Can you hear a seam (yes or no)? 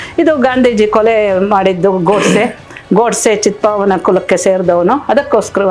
no